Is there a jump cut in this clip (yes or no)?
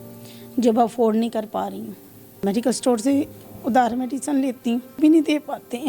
yes